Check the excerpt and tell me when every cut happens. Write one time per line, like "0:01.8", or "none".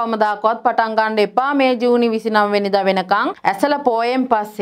0:03.3

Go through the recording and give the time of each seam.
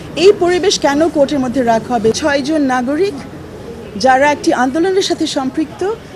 0:02.2

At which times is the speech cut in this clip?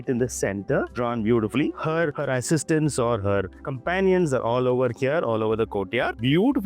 none

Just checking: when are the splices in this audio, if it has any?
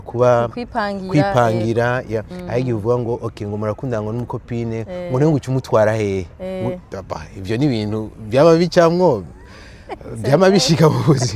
0:02.4

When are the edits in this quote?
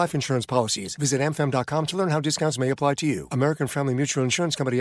none

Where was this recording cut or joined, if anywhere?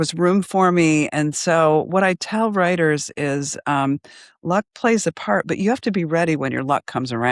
none

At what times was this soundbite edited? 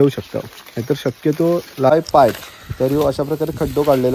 0:01.9

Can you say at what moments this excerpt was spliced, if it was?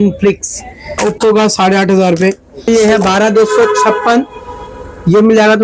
0:01.0
0:02.7

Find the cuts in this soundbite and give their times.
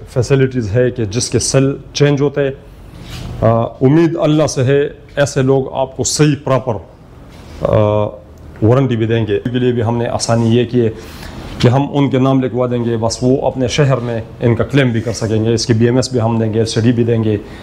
0:09.5

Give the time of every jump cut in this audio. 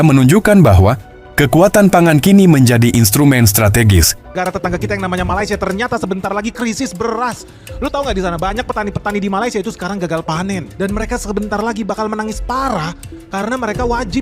0:04.3

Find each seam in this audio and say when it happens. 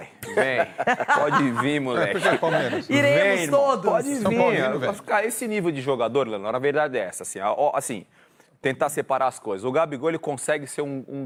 none

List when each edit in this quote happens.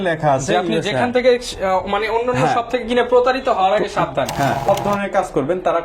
0:04.6

